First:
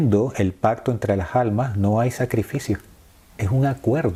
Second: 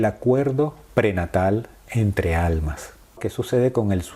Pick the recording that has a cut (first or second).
second